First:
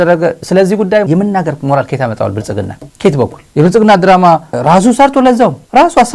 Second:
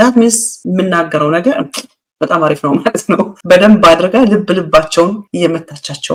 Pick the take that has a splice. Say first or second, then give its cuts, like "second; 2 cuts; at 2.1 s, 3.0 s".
first; 3 cuts; at 1.1 s, 2.8 s, 3.4 s